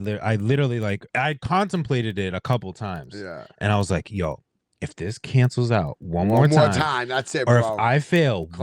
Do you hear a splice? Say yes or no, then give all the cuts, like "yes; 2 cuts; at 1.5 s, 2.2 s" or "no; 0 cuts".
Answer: yes; 1 cut; at 1.0 s